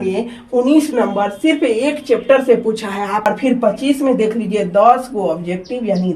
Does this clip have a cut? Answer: yes; 1 cut; at 3.2 s

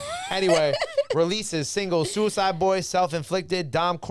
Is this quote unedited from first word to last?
yes; 0 cuts

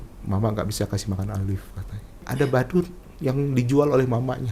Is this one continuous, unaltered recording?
no; 1 cut; at 2.3 s

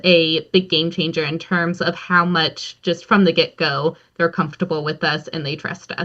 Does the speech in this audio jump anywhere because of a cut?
no; 0 cuts

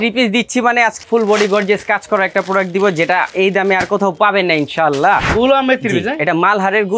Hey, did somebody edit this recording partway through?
yes; 3 cuts; at 1.0 s, 3.3 s, 5.3 s

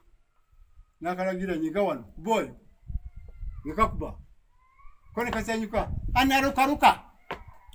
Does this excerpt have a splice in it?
no; 0 cuts

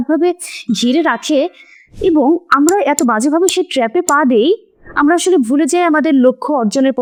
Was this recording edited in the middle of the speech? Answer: no; 0 cuts

